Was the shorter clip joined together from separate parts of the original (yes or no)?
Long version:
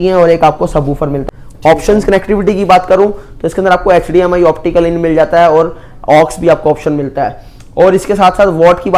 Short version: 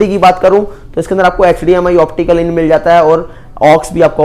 no